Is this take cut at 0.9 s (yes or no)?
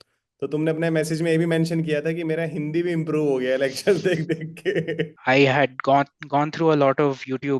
no